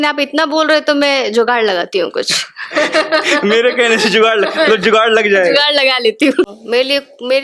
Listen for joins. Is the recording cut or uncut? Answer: cut